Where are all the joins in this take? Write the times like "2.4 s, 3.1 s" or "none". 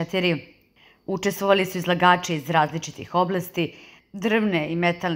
3.8 s